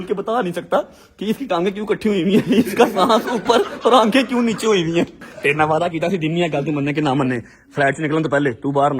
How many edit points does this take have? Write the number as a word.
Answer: one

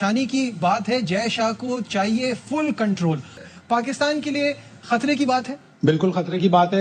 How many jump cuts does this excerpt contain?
one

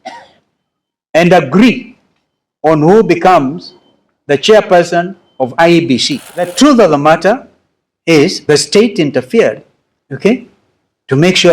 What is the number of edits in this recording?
one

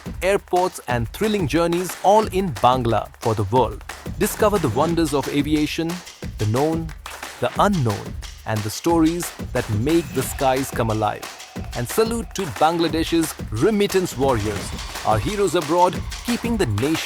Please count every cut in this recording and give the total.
zero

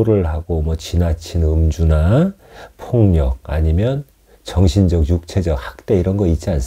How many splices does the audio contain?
zero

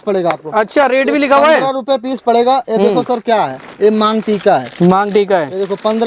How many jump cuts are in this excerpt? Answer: zero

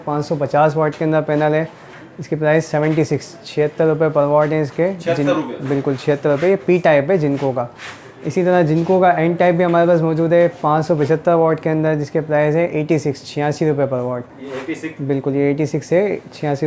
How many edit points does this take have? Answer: zero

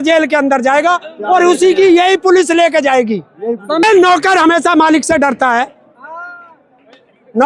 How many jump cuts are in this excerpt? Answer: one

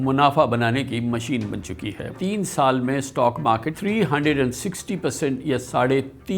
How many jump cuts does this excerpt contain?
two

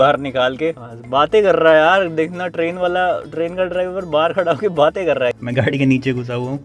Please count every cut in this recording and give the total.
two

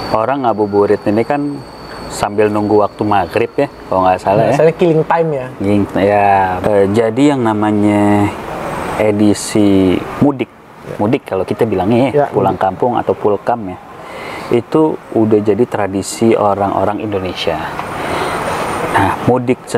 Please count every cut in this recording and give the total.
one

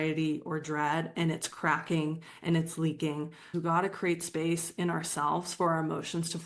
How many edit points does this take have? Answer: one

